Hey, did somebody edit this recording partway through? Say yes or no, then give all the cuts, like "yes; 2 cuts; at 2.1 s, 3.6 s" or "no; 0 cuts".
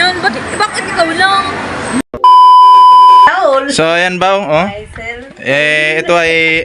yes; 2 cuts; at 2.0 s, 3.3 s